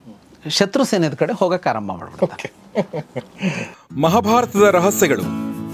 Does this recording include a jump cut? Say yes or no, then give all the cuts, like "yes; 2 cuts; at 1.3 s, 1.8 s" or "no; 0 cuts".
yes; 1 cut; at 3.7 s